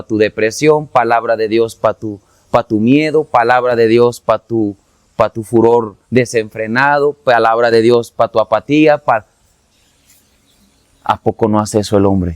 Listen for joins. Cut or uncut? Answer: uncut